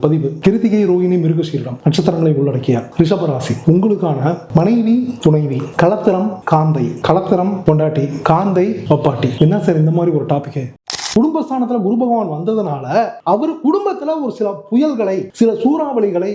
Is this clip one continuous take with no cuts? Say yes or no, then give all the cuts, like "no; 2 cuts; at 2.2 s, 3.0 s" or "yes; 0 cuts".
no; 1 cut; at 10.7 s